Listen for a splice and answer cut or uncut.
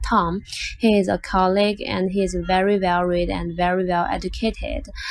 cut